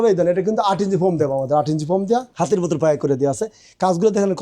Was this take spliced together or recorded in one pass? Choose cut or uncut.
cut